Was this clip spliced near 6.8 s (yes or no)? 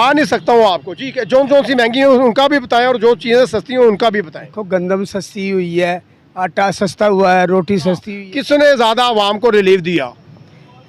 no